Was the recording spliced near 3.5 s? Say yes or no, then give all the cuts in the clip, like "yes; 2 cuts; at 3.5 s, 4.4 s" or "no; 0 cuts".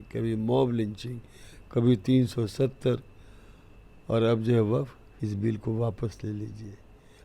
no; 1 cut; at 5.0 s